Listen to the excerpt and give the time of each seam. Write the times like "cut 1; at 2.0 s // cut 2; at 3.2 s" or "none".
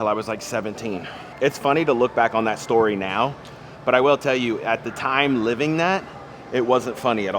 cut 1; at 1.2 s